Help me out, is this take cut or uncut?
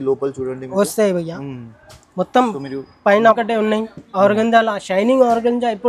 cut